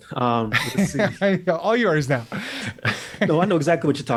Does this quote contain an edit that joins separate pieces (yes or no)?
no